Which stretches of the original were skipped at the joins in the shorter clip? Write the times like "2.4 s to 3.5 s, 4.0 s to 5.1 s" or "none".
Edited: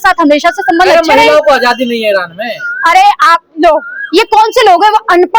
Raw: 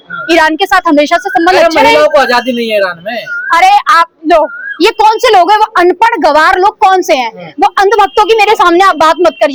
none